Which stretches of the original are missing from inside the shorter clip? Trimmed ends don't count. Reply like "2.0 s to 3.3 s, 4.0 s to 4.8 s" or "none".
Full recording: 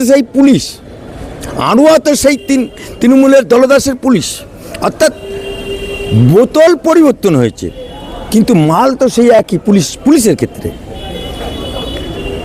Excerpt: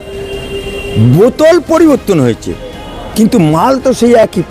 none